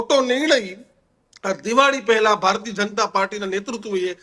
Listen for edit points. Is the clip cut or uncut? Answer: uncut